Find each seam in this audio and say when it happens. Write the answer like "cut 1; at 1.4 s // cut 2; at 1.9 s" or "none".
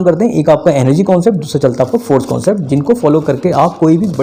none